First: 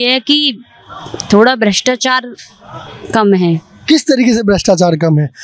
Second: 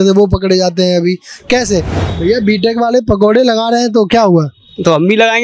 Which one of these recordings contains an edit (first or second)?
second